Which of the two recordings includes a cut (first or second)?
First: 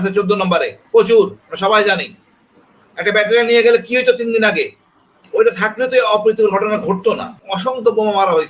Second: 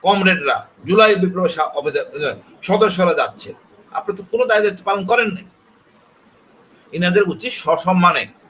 first